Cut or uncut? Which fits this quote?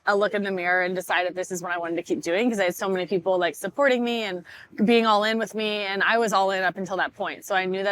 uncut